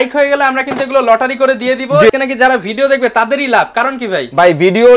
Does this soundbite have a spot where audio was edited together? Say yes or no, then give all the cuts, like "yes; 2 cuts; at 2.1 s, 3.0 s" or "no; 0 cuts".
yes; 1 cut; at 2.1 s